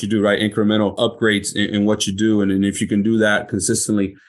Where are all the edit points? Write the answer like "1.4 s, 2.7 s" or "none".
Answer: 0.9 s